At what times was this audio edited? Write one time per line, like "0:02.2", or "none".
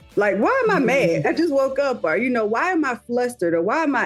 0:01.2

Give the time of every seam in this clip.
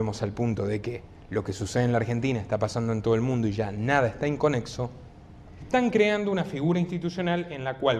0:05.6

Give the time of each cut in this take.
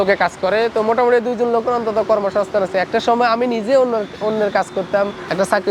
none

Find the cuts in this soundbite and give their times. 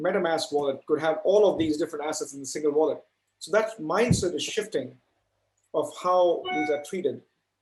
none

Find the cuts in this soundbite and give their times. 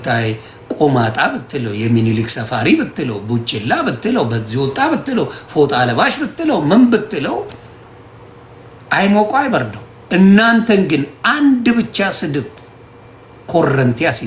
none

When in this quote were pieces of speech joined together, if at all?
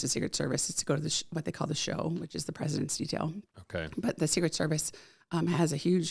none

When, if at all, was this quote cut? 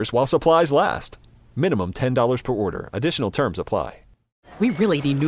0:04.3

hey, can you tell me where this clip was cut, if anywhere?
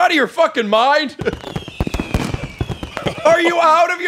0:01.4
0:03.0

